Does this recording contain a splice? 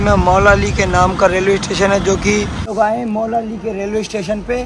yes; 1 cut; at 2.7 s

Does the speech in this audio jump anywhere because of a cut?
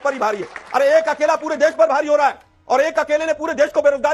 no; 0 cuts

